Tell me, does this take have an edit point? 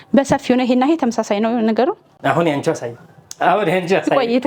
yes; 1 cut; at 2.2 s

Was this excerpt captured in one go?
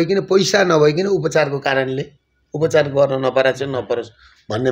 yes; 0 cuts

